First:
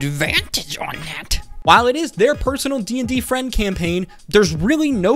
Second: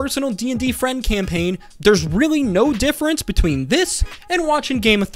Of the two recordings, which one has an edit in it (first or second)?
first